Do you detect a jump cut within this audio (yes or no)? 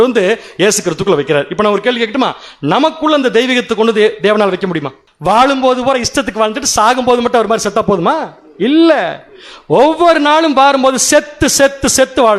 yes